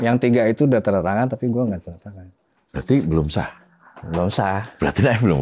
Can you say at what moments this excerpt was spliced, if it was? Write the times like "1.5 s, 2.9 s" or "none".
none

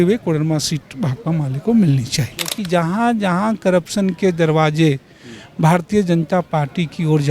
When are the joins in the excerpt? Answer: 2.6 s

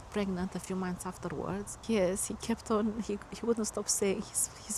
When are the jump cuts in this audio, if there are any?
1.7 s

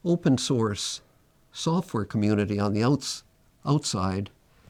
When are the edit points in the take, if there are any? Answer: none

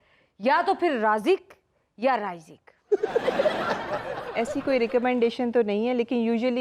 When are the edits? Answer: 4.2 s

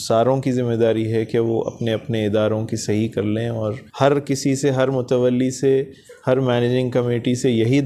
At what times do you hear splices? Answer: 3.8 s

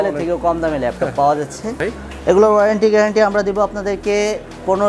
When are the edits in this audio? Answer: 1.8 s

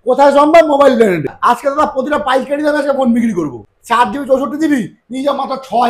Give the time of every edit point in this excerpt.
1.3 s, 3.7 s

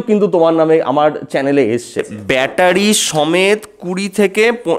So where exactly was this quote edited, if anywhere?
2.0 s

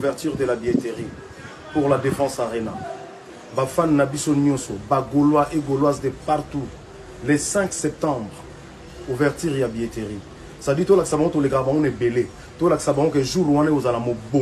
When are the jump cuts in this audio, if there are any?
none

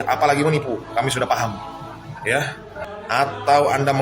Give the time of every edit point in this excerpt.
2.8 s

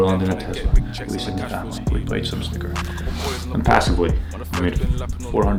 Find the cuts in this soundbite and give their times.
none

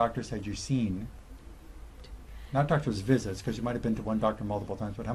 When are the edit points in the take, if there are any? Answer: none

